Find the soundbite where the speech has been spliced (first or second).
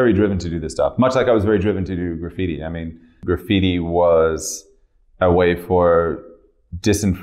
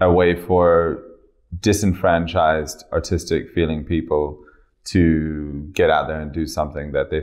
first